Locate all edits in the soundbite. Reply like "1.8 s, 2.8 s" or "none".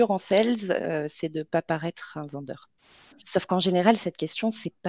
3.2 s